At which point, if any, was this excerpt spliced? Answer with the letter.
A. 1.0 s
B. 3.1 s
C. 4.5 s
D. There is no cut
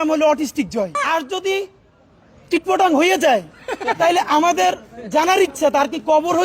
A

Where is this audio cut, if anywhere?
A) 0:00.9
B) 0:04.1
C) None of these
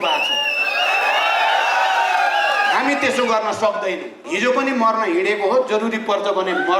B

